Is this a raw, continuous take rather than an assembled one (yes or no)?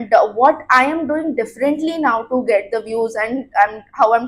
yes